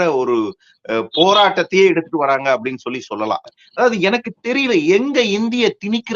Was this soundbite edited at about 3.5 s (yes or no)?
yes